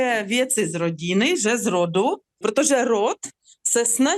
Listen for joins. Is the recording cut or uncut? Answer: cut